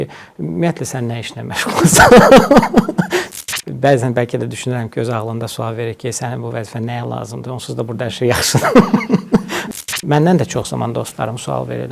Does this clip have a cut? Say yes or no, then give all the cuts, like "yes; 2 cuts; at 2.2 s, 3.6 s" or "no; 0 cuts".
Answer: yes; 2 cuts; at 3.3 s, 9.6 s